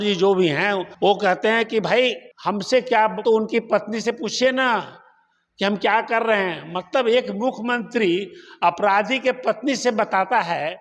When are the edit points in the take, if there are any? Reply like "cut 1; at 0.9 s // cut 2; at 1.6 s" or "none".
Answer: cut 1; at 0.9 s // cut 2; at 2.3 s // cut 3; at 3.2 s